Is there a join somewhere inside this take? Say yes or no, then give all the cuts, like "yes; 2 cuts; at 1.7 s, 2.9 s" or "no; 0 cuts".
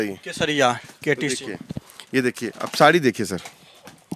no; 0 cuts